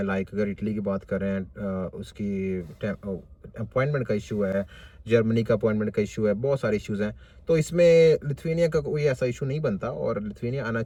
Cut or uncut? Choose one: uncut